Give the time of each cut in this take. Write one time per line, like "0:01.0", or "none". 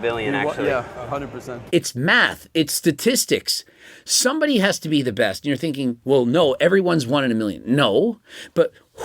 0:01.6

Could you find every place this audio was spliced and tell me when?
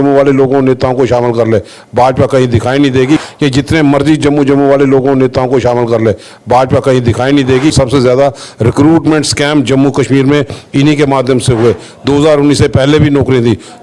0:03.2
0:07.7

